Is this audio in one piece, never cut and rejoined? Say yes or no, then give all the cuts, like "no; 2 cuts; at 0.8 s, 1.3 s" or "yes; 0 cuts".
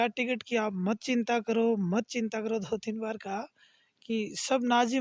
yes; 0 cuts